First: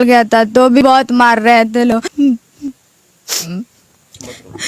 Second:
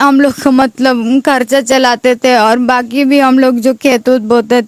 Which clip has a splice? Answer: first; 2 cuts; at 0.8 s, 2.1 s

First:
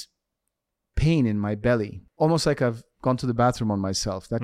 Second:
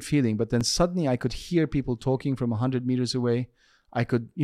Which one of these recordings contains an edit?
first; 1 cut; at 2.0 s

